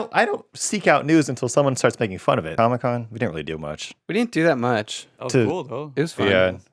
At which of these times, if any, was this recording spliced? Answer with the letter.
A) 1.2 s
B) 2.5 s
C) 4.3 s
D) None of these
B